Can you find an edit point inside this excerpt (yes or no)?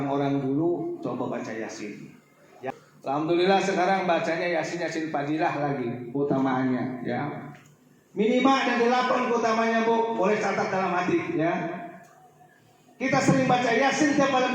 yes